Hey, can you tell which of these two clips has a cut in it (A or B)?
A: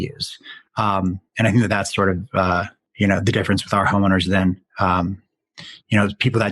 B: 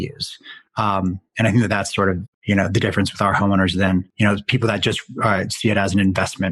B